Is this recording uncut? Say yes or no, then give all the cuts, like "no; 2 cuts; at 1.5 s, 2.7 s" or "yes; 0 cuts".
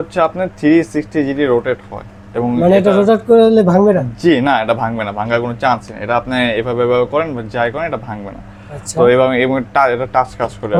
yes; 0 cuts